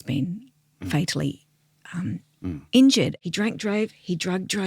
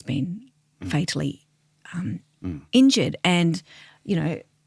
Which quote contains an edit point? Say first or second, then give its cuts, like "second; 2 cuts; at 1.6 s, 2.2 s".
first; 1 cut; at 3.2 s